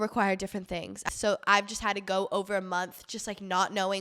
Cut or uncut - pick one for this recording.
cut